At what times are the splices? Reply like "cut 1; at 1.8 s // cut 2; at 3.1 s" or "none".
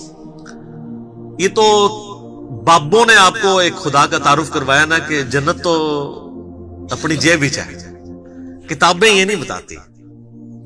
cut 1; at 1.0 s

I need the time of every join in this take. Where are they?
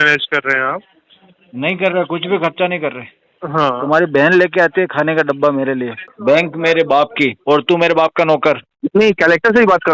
cut 1; at 3.3 s // cut 2; at 6.0 s // cut 3; at 8.7 s

